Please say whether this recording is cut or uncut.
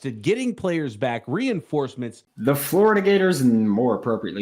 cut